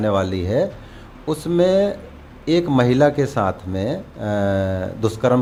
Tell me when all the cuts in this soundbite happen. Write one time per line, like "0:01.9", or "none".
none